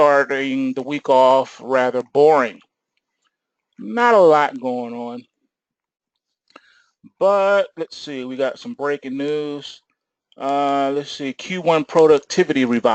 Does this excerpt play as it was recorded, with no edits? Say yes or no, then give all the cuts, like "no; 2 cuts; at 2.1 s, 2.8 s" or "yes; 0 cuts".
yes; 0 cuts